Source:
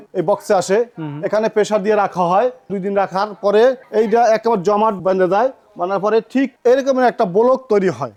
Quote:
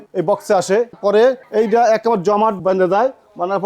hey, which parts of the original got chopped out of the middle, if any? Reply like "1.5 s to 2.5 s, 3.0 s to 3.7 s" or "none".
0.9 s to 3.3 s